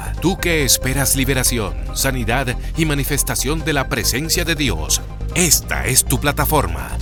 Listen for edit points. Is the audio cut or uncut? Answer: uncut